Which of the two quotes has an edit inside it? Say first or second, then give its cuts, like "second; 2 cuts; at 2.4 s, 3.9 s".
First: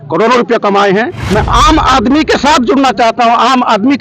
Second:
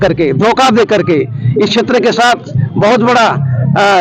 first; 1 cut; at 1.2 s